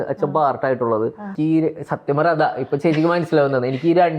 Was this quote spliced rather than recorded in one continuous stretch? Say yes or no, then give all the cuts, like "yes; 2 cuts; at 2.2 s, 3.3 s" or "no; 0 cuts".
yes; 1 cut; at 1.3 s